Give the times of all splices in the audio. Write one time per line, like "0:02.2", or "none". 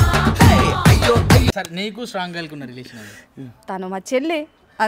0:01.5

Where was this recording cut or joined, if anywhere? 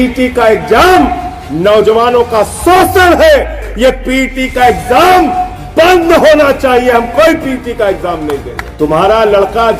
0:03.6
0:08.6

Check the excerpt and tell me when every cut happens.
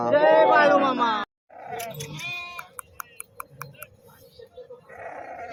none

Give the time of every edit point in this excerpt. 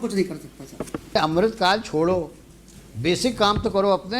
0:01.2

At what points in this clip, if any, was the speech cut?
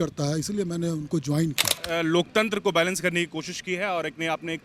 0:01.8

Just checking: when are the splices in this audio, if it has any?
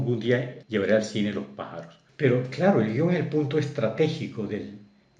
0:02.0

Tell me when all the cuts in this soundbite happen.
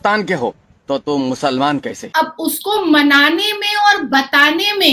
0:02.0

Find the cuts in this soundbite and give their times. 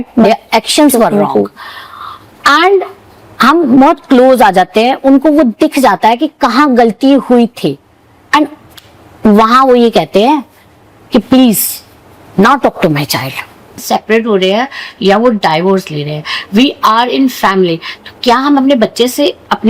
0:13.8

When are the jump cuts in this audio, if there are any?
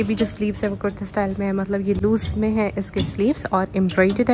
none

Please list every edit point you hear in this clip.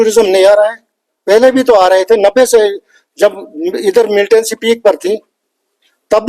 none

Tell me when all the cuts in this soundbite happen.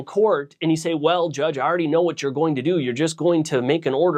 none

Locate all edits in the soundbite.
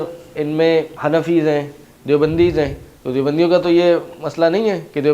0:01.0

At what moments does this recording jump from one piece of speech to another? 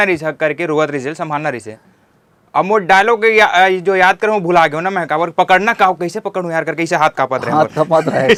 none

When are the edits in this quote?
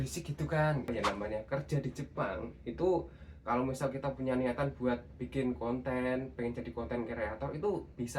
0:00.9

